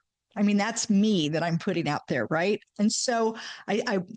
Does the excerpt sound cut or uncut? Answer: uncut